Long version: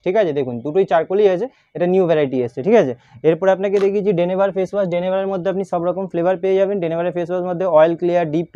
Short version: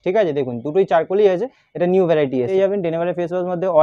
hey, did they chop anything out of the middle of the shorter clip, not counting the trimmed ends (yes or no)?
yes